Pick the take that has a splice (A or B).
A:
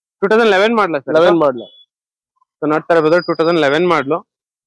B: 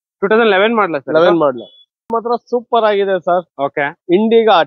B